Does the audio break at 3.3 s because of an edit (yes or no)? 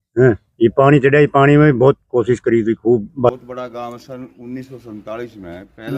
yes